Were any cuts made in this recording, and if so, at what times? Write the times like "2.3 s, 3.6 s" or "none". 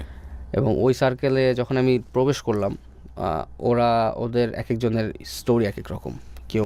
none